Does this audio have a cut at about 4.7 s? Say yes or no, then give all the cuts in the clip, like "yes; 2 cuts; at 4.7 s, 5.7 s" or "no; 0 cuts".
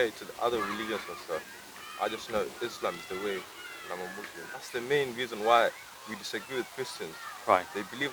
yes; 1 cut; at 4.7 s